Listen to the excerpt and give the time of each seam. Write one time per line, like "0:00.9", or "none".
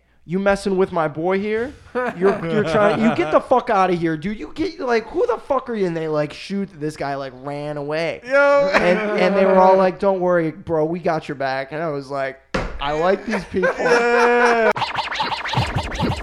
0:14.7